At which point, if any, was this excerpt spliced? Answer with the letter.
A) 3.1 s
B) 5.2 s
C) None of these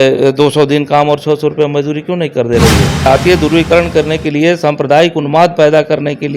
A